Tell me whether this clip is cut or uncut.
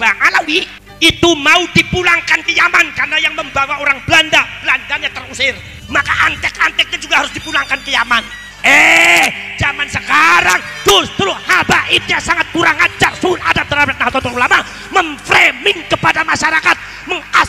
cut